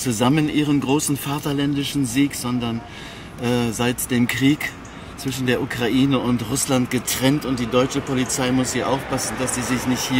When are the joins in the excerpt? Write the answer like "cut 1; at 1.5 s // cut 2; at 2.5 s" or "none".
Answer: none